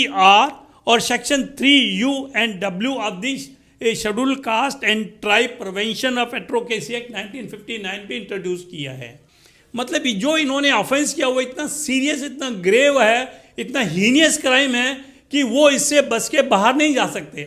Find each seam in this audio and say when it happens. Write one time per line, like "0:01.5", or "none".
none